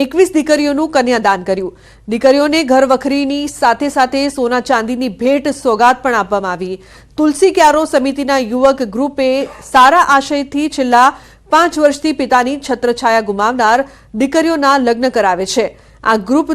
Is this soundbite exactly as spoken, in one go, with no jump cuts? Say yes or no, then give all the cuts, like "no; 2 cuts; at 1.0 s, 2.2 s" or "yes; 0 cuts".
yes; 0 cuts